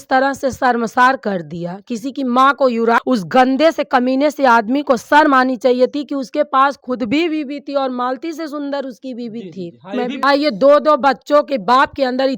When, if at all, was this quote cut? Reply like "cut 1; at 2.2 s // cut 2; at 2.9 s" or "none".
cut 1; at 3.0 s // cut 2; at 10.2 s